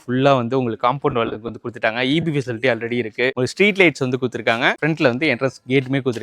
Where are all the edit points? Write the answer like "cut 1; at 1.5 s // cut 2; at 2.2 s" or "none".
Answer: cut 1; at 4.8 s